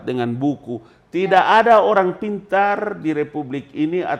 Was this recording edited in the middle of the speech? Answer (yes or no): no